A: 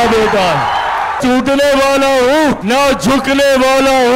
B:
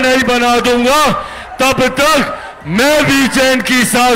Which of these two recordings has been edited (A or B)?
A